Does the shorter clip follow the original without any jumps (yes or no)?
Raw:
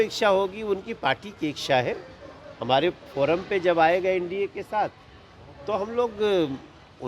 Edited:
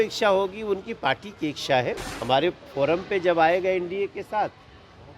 no